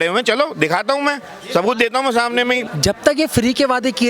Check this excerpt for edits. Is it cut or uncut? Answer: cut